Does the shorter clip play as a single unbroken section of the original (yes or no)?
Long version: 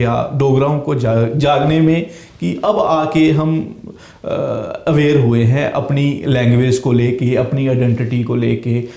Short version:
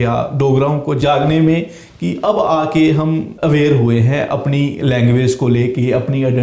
no